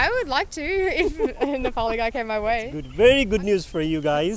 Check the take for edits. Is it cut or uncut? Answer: cut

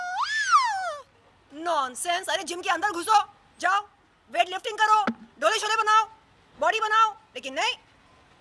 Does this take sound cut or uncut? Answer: cut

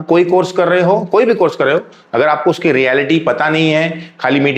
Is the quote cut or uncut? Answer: uncut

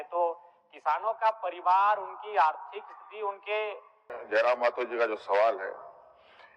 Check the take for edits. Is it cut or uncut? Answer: cut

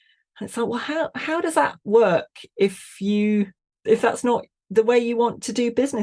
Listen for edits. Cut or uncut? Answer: cut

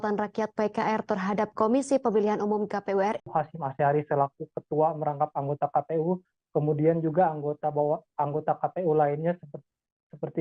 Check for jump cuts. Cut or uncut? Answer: cut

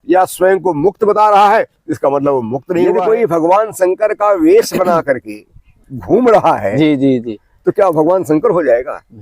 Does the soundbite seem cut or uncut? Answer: cut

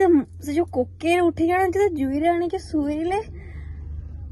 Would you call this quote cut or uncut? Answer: uncut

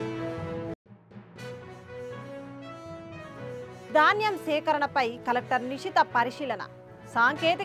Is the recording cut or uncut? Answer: uncut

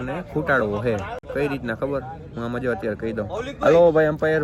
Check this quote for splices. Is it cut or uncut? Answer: uncut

